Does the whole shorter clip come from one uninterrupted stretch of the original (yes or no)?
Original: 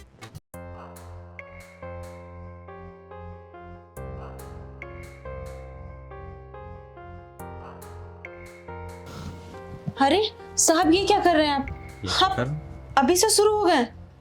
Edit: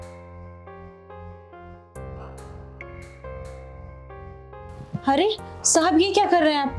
no